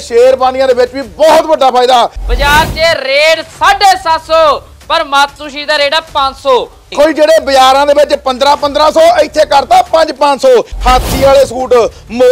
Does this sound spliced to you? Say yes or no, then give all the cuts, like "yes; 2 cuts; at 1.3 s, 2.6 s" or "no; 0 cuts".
yes; 3 cuts; at 2.2 s, 6.9 s, 10.7 s